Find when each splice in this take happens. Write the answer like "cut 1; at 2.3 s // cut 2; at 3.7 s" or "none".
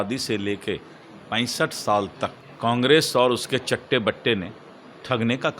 cut 1; at 2.4 s